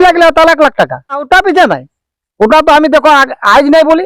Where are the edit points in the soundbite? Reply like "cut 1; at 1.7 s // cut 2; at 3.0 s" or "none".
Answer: cut 1; at 1.3 s

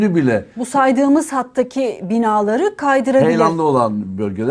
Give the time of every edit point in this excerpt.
none

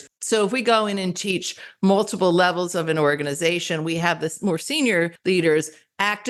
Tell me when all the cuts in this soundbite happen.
none

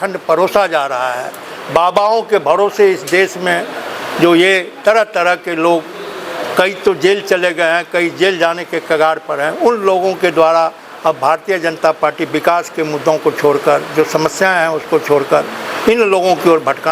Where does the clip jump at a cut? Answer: none

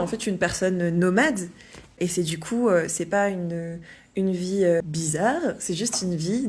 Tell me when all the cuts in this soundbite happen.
cut 1; at 1.9 s // cut 2; at 4.8 s

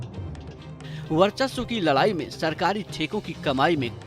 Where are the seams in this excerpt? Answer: cut 1; at 1.1 s

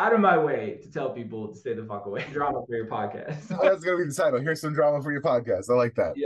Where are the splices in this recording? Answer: cut 1; at 2.3 s // cut 2; at 3.6 s

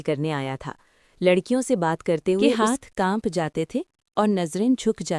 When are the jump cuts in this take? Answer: cut 1; at 2.5 s

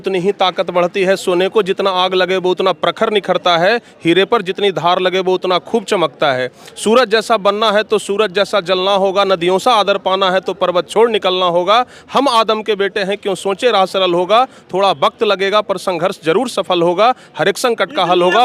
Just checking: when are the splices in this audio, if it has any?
none

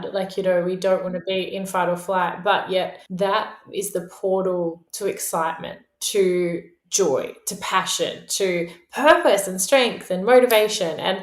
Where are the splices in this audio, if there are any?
cut 1; at 3.0 s

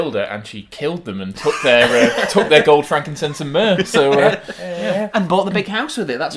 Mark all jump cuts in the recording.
none

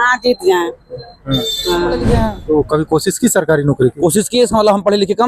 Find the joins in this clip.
cut 1; at 2.0 s

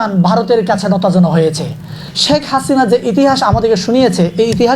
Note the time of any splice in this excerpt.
cut 1; at 2.1 s

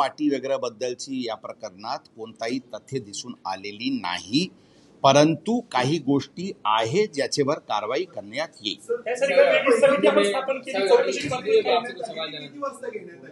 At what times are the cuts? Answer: none

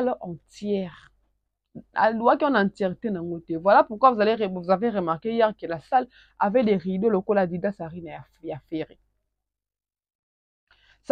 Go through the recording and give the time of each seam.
none

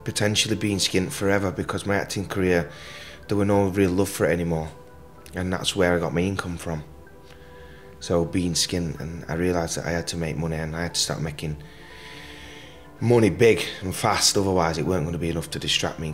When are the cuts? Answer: none

